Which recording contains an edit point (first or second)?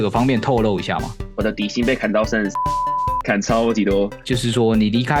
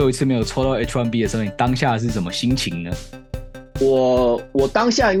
first